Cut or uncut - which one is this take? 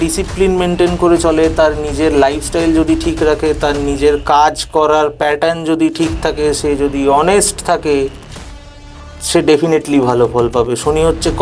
uncut